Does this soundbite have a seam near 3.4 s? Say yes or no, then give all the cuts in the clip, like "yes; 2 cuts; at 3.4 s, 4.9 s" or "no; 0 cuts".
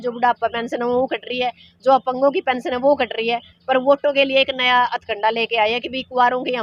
no; 0 cuts